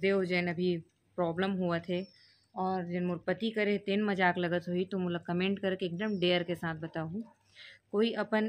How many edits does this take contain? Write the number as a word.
zero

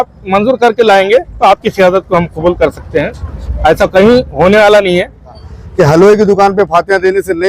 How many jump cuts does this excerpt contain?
one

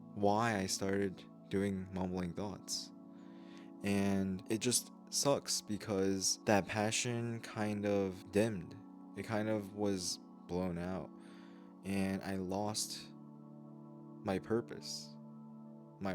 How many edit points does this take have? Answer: three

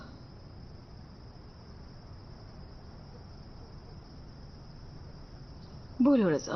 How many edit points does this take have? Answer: one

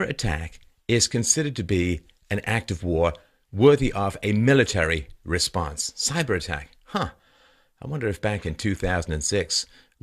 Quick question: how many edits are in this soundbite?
zero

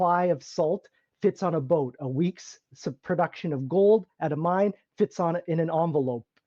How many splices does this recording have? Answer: zero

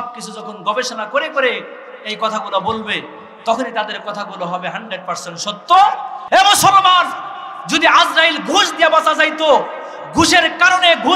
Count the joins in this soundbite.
one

